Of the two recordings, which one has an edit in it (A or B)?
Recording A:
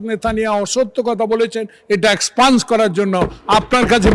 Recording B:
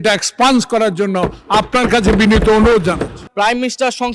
B